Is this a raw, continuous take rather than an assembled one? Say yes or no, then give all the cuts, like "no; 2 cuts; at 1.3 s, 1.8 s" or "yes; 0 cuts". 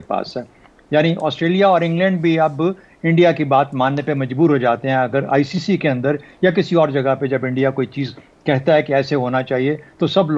yes; 0 cuts